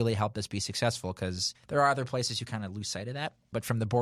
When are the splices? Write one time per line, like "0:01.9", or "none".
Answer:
0:01.5